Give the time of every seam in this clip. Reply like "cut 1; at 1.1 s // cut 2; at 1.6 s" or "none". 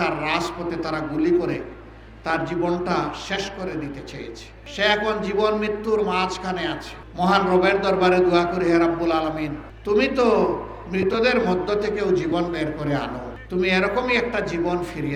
none